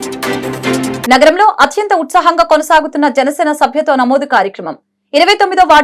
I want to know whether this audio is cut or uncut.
uncut